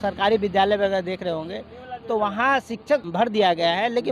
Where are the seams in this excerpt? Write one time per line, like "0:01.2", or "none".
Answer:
0:03.0